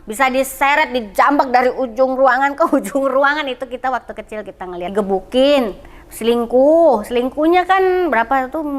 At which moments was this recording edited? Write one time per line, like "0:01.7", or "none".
0:04.9